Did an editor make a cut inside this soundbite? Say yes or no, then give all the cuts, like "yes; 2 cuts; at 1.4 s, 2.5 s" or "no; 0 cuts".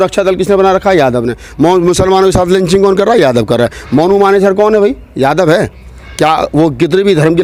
no; 0 cuts